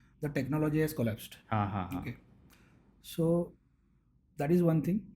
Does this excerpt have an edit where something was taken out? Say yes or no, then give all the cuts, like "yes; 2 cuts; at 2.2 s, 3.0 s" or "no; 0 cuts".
no; 0 cuts